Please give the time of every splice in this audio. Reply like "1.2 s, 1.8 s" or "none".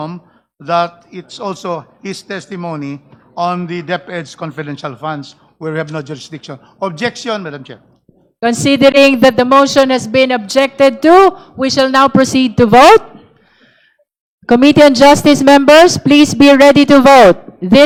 none